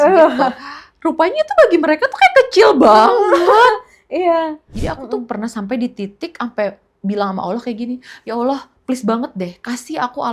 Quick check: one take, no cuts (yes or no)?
no